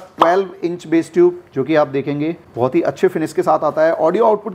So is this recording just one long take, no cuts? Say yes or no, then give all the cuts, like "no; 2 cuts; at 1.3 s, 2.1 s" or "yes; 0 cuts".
yes; 0 cuts